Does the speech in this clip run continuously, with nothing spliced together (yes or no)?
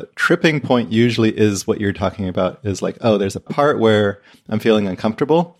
yes